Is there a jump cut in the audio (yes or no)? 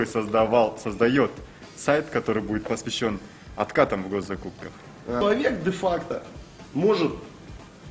yes